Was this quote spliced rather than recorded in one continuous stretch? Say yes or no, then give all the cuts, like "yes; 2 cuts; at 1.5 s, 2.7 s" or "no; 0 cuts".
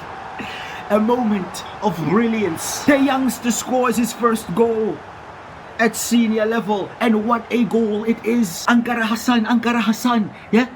yes; 2 cuts; at 2.7 s, 8.6 s